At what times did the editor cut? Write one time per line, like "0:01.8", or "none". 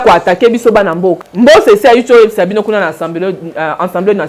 0:01.3